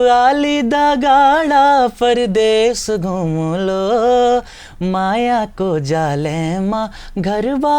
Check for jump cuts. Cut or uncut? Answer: uncut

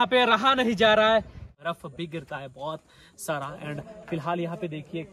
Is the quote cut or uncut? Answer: cut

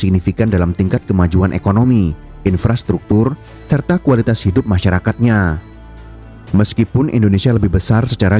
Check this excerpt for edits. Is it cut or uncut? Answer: uncut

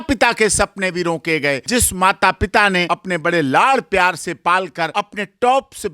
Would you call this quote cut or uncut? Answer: cut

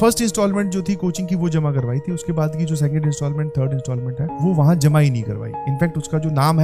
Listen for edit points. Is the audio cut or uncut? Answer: uncut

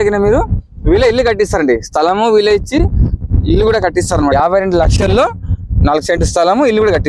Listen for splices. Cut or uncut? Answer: cut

